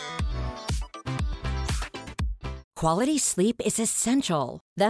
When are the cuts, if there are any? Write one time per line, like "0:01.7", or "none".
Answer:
0:02.6